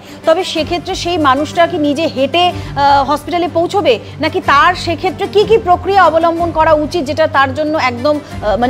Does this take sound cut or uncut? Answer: uncut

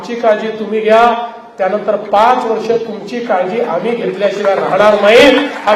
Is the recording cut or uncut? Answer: uncut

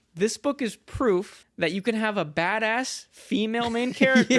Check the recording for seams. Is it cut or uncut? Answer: cut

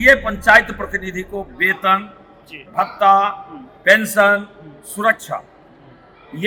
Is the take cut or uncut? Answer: uncut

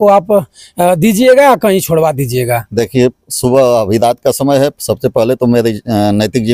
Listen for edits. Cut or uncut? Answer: uncut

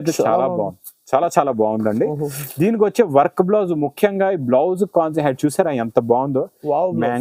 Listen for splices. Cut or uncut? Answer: uncut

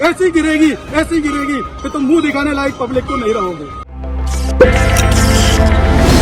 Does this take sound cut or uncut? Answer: uncut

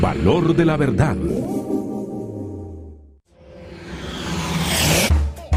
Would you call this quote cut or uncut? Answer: uncut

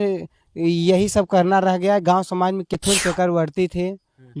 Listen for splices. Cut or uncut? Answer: cut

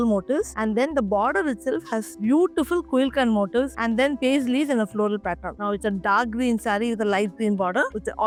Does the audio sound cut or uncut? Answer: uncut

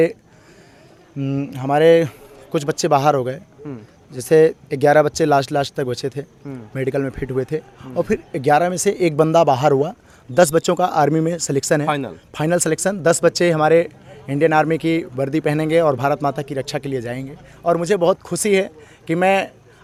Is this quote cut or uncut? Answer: uncut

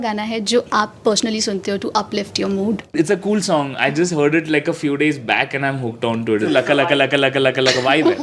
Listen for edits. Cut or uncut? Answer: cut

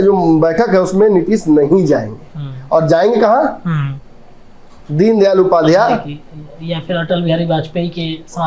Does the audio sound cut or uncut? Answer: uncut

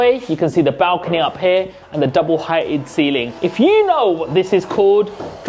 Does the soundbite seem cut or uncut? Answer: uncut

